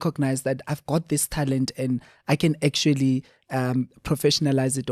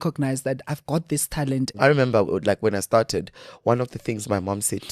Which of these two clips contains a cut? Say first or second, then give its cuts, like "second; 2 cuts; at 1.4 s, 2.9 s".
second; 1 cut; at 1.7 s